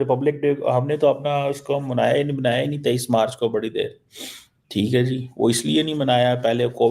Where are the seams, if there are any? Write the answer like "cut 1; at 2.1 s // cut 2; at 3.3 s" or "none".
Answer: none